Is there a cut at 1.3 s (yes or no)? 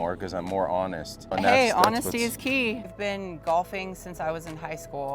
yes